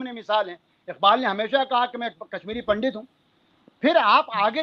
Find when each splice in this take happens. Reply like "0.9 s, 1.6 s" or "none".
none